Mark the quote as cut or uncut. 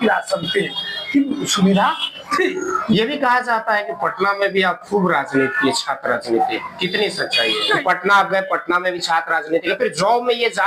cut